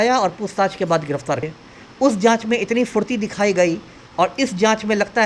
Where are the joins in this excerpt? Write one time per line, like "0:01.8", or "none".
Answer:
0:01.4

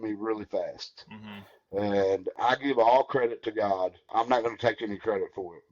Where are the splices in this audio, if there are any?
0:02.3
0:04.1

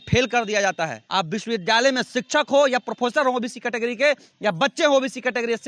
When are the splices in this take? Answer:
0:01.0

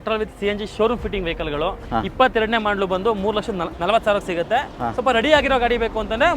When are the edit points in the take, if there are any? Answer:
0:01.8
0:03.7

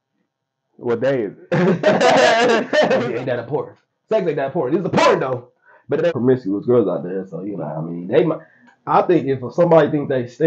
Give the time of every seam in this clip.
0:03.0
0:06.1

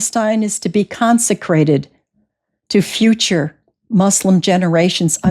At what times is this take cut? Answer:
none

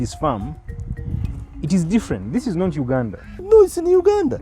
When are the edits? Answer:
0:03.5

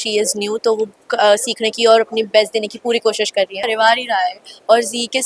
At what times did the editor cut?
0:03.7

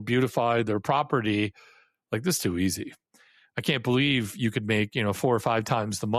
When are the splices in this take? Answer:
none

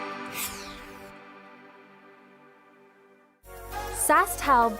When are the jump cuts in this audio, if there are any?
0:03.3

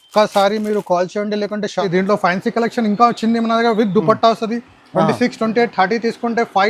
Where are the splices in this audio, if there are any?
0:01.8

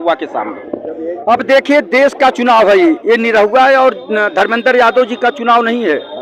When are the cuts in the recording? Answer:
none

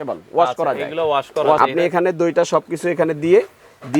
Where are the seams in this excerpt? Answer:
0:01.6

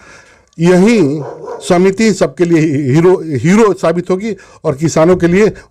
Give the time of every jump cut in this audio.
none

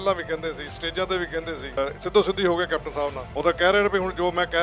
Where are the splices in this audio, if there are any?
0:01.8
0:03.2

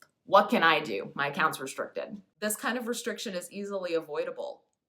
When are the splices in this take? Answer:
0:02.3

